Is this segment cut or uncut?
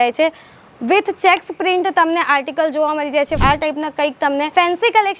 cut